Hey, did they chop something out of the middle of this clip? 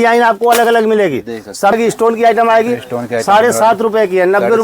yes; 1 cut; at 1.7 s

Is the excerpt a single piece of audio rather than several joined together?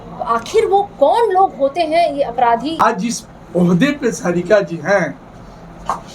no; 1 cut; at 2.8 s

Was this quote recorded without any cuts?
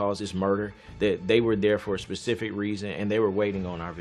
yes; 0 cuts

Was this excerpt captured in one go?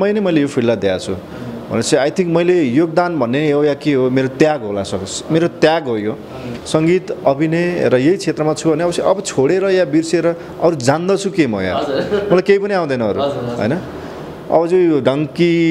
no; 1 cut; at 6.5 s

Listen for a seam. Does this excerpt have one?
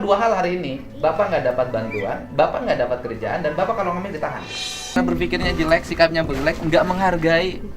yes; 1 cut; at 5.0 s

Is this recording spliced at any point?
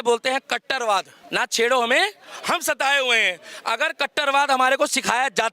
yes; 1 cut; at 1.2 s

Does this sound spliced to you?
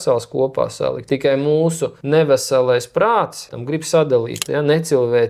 yes; 4 cuts; at 1.0 s, 1.9 s, 3.6 s, 4.4 s

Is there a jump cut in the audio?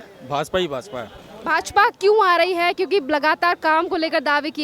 no; 0 cuts

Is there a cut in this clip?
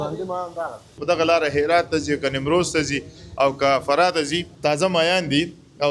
yes; 2 cuts; at 1.0 s, 4.4 s

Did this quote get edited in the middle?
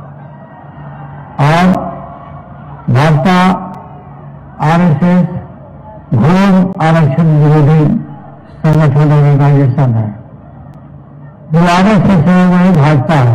no; 0 cuts

